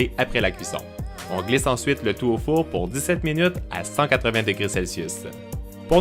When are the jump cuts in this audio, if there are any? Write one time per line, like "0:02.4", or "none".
0:04.7